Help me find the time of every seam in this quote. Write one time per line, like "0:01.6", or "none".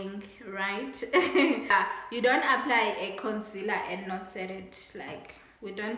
0:01.7